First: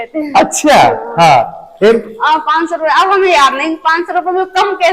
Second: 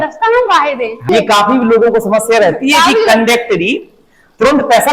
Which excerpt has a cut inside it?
second; 1 cut; at 1.1 s

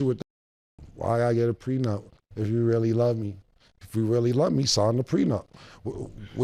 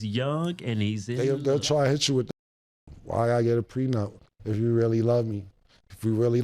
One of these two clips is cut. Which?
second; 1 cut; at 1.1 s

